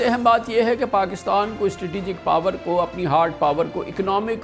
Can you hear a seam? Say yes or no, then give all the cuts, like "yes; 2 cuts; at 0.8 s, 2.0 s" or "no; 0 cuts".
no; 0 cuts